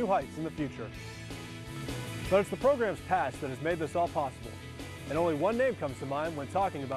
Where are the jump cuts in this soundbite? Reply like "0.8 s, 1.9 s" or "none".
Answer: 1.6 s